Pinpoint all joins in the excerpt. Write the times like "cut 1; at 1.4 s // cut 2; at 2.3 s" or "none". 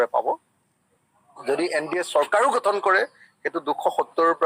none